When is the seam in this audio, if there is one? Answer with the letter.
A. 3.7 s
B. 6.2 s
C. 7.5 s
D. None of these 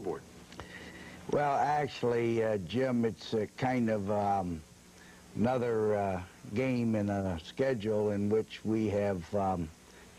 C